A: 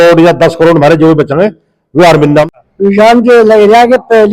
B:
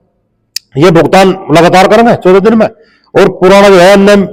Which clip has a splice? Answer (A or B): A